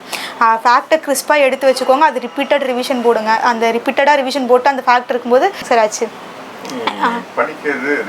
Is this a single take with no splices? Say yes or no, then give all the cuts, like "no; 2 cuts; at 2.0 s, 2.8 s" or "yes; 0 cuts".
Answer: no; 1 cut; at 5.6 s